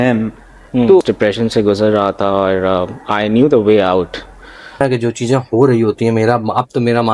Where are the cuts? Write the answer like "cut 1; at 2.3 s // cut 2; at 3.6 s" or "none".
cut 1; at 1.0 s // cut 2; at 4.8 s